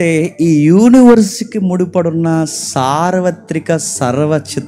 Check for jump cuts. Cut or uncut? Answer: uncut